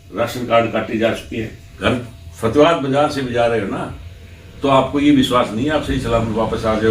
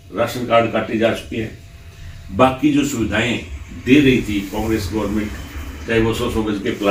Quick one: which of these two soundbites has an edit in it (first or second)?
first